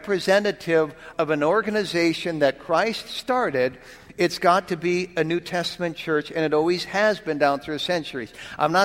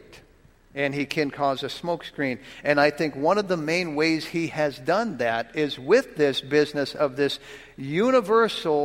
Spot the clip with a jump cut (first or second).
first